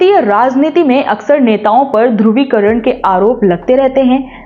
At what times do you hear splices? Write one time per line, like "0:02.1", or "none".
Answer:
none

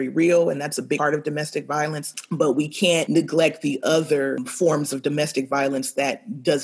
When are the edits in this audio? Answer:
0:01.0
0:02.1
0:03.1
0:04.5

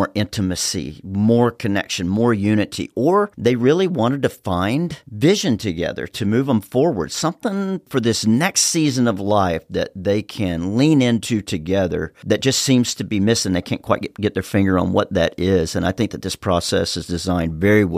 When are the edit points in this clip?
none

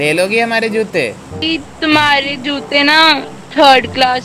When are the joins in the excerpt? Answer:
0:01.4

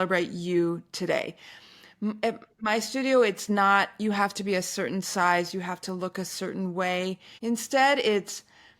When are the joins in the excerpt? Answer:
0:07.3

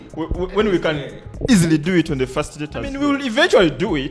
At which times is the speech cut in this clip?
0:02.9

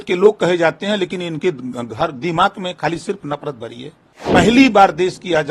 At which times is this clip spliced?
0:04.2

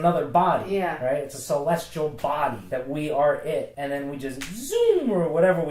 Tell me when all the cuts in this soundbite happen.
0:02.6
0:03.8

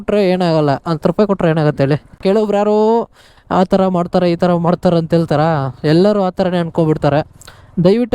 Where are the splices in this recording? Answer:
0:02.2

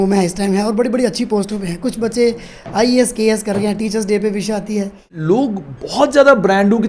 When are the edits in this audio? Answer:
0:05.1

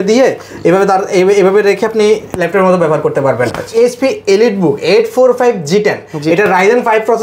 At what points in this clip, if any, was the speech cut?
0:03.7

